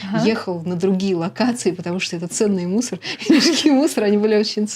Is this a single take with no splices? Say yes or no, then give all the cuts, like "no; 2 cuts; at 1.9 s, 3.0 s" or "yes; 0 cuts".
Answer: yes; 0 cuts